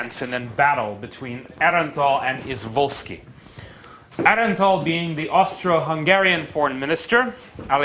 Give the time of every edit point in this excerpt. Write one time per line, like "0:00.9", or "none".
none